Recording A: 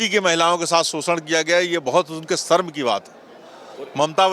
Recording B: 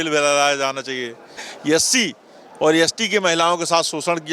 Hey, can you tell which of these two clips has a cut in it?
B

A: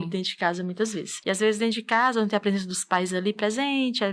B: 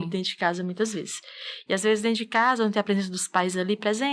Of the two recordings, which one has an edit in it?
A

